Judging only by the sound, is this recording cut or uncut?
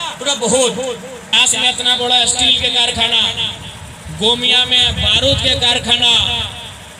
cut